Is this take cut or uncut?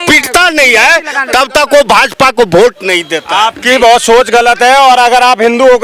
uncut